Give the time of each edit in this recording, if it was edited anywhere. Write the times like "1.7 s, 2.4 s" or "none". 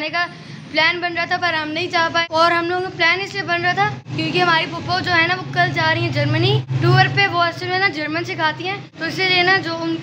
2.2 s, 4.0 s, 6.7 s, 8.9 s